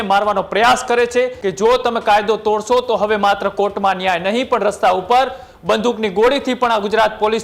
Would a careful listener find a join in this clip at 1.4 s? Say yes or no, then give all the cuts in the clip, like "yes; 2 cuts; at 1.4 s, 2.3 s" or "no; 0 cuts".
yes; 1 cut; at 1.4 s